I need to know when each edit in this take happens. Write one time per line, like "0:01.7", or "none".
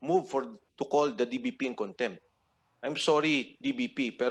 none